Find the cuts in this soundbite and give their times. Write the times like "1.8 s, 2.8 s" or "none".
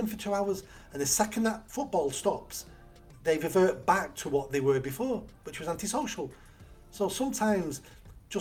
1.6 s